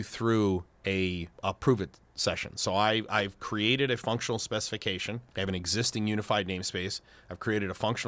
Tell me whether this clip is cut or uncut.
uncut